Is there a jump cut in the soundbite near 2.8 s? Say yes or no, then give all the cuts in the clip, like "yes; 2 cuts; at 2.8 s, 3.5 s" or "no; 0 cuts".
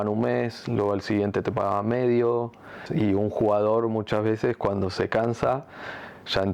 yes; 1 cut; at 2.8 s